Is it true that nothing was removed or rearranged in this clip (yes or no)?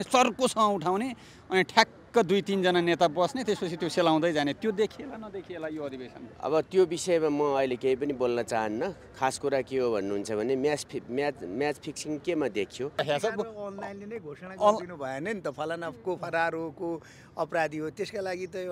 no